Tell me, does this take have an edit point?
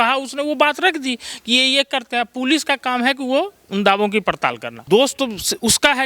yes; 1 cut; at 4.8 s

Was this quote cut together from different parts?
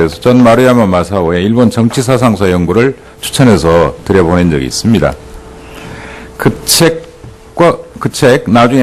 no; 0 cuts

